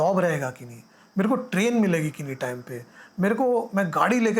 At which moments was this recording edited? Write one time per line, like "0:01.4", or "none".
none